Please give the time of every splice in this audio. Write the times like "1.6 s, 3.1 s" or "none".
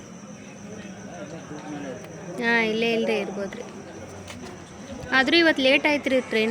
none